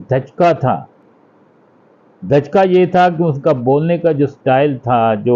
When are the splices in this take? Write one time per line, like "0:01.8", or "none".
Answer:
none